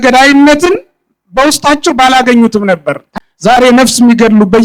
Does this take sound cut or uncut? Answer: cut